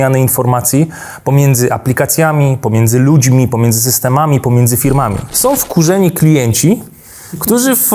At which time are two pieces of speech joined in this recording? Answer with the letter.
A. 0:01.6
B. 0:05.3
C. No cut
B